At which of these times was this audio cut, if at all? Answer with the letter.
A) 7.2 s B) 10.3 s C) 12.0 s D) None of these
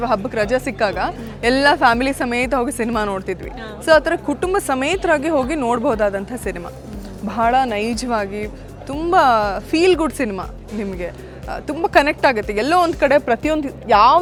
D